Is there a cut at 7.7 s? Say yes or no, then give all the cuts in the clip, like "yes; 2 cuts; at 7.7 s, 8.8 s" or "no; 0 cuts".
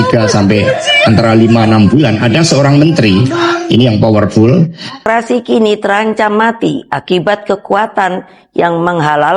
no; 1 cut; at 5.0 s